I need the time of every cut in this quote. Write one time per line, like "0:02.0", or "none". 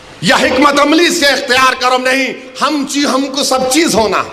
none